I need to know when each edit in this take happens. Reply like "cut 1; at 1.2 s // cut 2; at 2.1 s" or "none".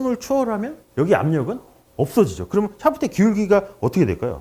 none